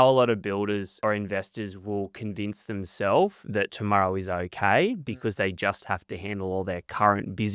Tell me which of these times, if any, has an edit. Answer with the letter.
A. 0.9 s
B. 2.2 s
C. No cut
A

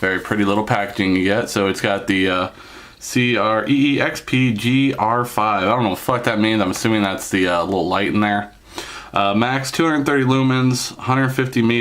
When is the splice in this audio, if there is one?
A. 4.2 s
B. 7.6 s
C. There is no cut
A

